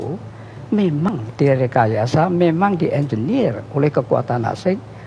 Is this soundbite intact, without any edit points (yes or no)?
no